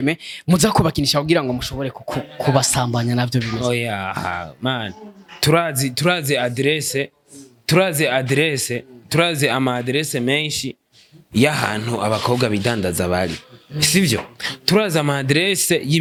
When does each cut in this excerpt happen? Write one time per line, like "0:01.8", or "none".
none